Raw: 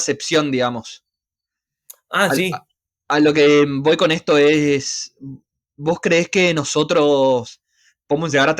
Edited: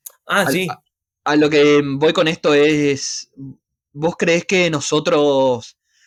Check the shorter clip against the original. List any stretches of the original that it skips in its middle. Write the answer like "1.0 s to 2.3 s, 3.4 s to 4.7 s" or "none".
none